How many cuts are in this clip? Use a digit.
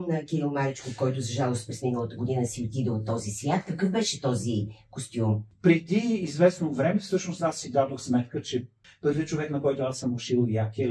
2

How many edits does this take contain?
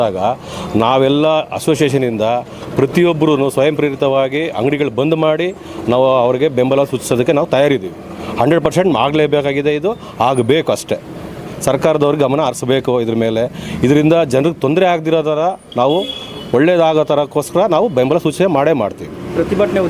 0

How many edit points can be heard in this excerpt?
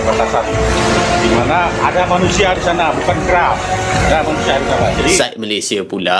1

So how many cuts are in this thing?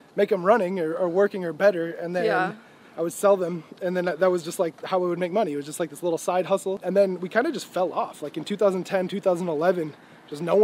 1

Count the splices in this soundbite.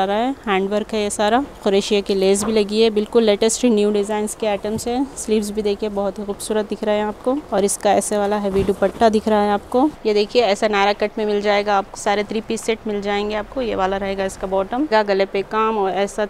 5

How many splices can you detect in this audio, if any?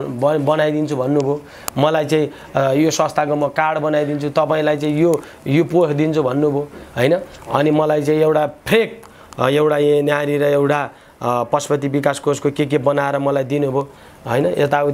0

